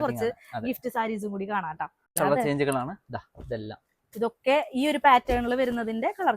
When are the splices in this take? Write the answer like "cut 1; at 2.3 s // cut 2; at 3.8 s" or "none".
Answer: cut 1; at 2.0 s